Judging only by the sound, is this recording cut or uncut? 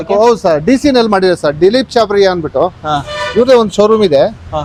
uncut